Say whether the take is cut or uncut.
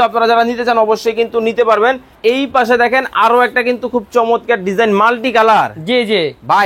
cut